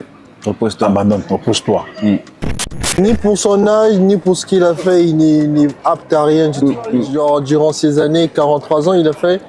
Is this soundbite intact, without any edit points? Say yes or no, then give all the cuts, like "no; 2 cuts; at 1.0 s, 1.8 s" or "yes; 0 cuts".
no; 2 cuts; at 2.9 s, 7.1 s